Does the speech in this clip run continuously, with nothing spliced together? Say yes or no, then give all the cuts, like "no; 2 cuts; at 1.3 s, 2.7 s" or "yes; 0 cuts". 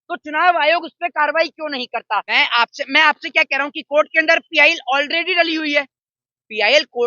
no; 1 cut; at 2.3 s